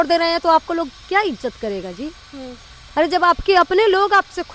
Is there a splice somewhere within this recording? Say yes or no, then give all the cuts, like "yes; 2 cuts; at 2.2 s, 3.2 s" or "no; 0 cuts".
no; 0 cuts